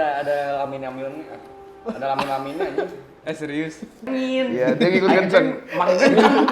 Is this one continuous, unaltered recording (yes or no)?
no